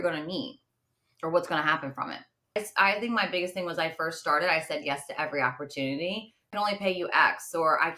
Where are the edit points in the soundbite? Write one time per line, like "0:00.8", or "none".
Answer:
0:02.6
0:06.5